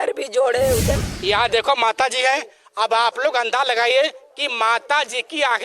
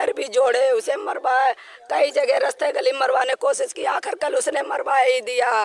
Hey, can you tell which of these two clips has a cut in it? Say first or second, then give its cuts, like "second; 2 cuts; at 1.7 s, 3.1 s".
first; 1 cut; at 1.1 s